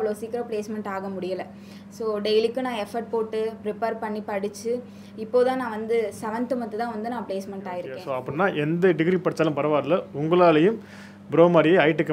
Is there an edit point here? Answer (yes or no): yes